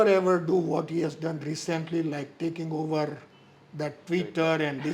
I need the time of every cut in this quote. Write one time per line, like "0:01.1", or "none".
none

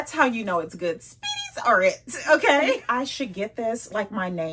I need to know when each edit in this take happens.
0:02.8

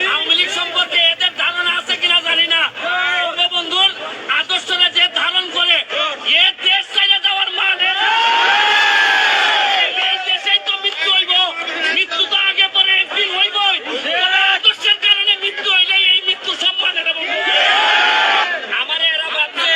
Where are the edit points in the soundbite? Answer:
0:18.5

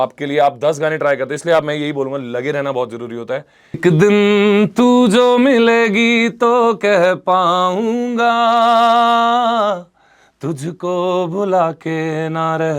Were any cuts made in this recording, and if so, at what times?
0:03.8

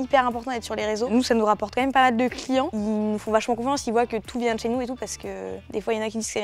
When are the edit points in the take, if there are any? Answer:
none

